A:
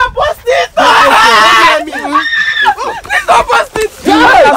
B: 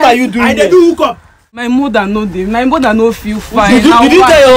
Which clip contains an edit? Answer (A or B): B